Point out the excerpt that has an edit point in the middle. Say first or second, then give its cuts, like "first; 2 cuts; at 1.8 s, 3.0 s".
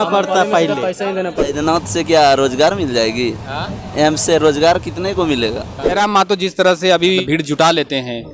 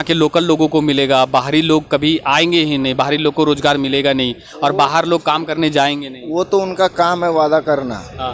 first; 3 cuts; at 1.4 s, 5.9 s, 7.2 s